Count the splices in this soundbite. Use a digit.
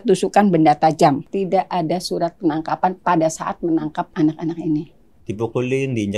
3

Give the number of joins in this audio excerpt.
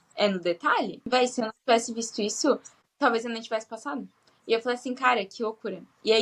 1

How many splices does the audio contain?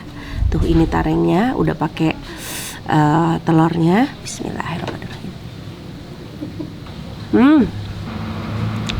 2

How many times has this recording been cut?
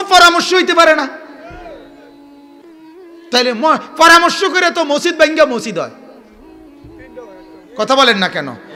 0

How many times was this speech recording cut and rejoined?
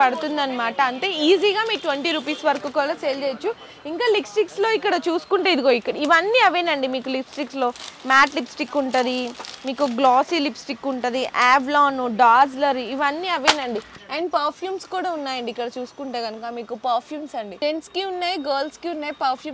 0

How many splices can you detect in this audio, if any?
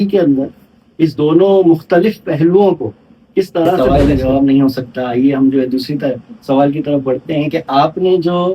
1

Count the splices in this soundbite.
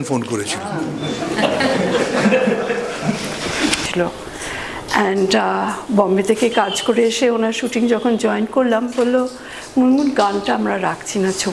1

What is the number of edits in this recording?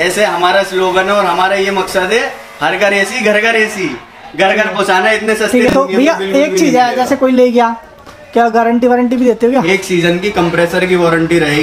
1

